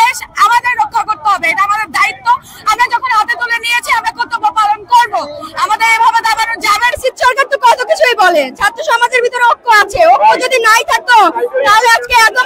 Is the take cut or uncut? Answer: cut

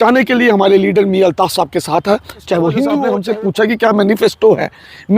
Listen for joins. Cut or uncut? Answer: cut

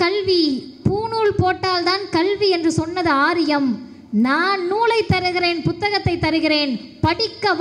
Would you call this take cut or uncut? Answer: uncut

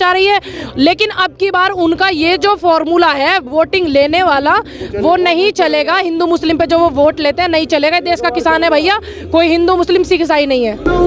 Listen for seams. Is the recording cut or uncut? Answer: uncut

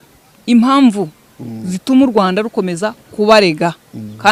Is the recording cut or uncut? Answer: uncut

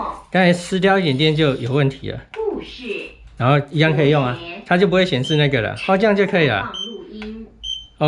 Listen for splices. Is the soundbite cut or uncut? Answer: uncut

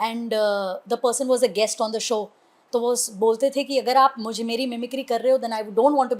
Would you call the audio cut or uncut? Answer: uncut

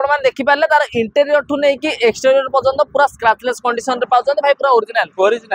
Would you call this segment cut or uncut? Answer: uncut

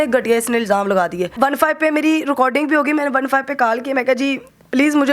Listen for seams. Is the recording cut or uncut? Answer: cut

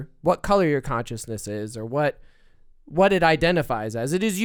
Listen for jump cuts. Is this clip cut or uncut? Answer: uncut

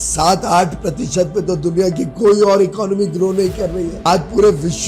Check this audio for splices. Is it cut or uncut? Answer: cut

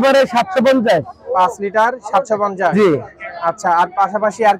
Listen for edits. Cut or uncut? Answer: uncut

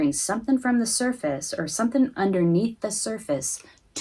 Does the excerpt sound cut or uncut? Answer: uncut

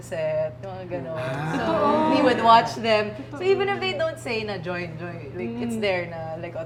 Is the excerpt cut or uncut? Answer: uncut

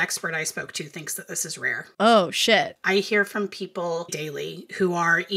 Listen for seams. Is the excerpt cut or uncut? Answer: cut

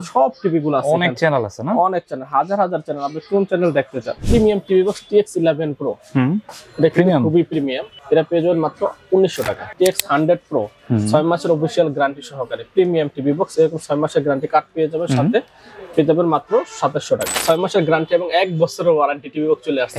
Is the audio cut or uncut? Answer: cut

